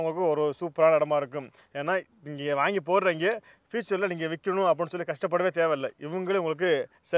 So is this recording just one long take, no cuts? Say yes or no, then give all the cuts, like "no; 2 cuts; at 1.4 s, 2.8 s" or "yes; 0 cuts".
yes; 0 cuts